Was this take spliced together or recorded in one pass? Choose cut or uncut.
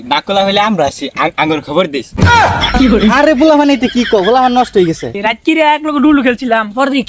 cut